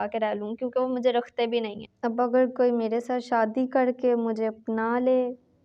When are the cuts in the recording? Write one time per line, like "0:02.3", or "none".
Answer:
0:01.8

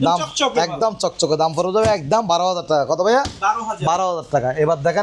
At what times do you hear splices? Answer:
none

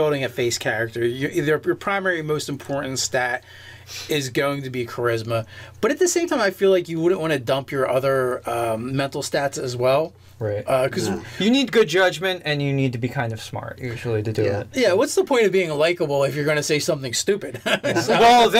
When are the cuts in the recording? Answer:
none

